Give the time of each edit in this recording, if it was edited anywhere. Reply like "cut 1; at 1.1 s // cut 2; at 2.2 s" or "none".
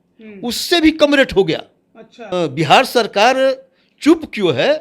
cut 1; at 2.2 s